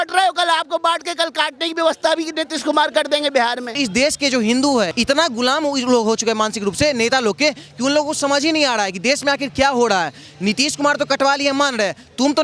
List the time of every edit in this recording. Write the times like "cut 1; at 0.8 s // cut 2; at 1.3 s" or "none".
cut 1; at 3.8 s // cut 2; at 4.9 s